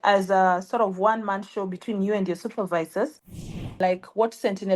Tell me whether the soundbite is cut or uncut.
cut